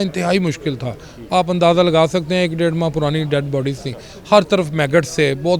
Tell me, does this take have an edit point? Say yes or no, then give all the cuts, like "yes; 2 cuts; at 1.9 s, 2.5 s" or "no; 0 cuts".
no; 0 cuts